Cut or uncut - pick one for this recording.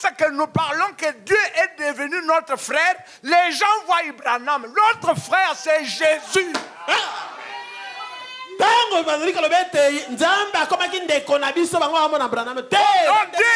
uncut